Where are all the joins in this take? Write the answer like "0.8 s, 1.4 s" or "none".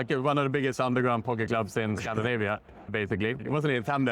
2.8 s

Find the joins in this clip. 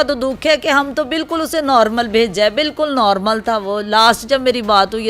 none

